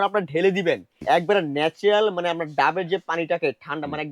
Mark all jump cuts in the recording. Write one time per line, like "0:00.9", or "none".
0:00.9